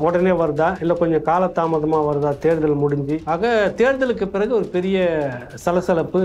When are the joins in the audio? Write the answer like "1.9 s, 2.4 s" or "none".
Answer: 3.2 s